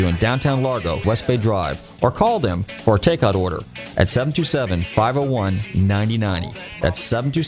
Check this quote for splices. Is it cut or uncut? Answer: cut